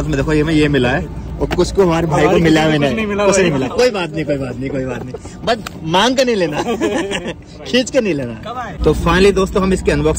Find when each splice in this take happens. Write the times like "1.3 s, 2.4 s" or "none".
none